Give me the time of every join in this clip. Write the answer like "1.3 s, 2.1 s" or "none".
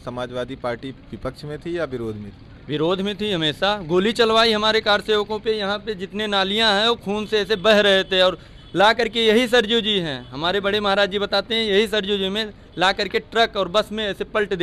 none

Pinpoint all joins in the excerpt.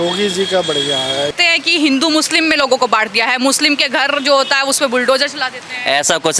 1.3 s

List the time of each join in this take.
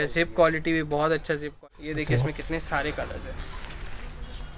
1.6 s

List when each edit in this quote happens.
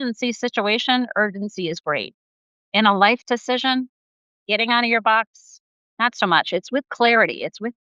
none

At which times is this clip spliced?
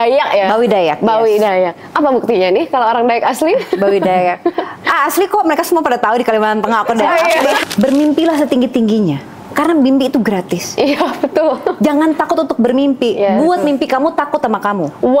7.6 s

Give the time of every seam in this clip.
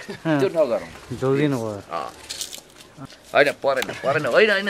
3.0 s

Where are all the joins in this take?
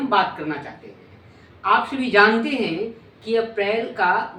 none

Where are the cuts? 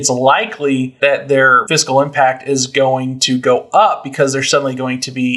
0.9 s, 1.6 s

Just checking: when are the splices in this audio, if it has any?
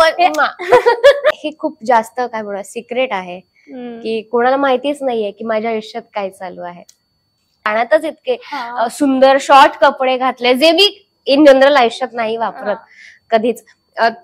1.4 s, 7.7 s

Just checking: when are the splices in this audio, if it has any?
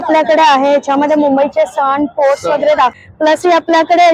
2.9 s

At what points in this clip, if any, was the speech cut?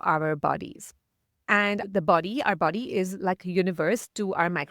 1.8 s

